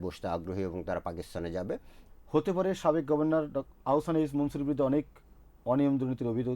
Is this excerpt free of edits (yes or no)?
no